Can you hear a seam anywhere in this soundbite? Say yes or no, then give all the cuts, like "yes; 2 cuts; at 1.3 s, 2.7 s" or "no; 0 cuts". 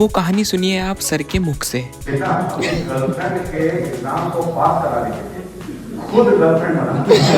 yes; 1 cut; at 2.0 s